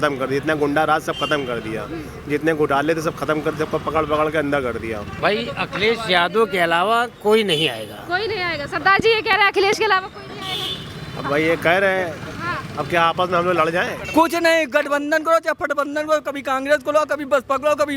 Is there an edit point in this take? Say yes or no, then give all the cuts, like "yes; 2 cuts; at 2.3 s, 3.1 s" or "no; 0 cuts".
yes; 2 cuts; at 5.1 s, 14.0 s